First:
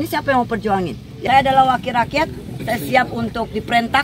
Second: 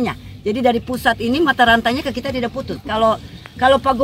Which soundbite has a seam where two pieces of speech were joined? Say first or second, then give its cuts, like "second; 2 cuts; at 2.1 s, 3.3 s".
first; 1 cut; at 1.1 s